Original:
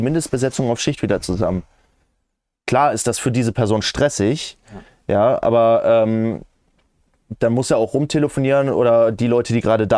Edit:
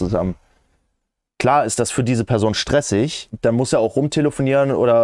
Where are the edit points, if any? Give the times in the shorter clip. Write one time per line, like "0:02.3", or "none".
0:03.2